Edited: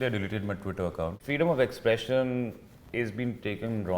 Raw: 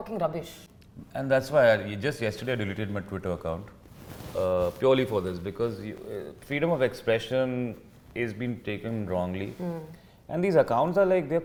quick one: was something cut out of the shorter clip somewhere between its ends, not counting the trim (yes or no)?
yes